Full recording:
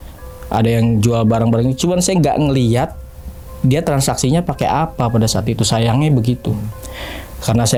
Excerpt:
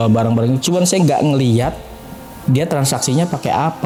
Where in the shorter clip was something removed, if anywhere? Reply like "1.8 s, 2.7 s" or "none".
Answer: none